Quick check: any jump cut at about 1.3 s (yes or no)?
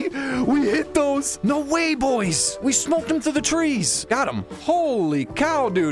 yes